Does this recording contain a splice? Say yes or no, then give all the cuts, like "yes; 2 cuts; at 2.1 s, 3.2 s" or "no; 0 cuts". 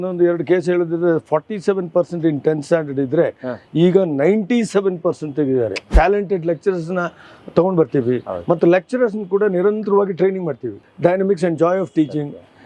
yes; 2 cuts; at 5.9 s, 10.8 s